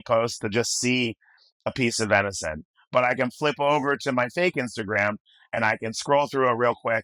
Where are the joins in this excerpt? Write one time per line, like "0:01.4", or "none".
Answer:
none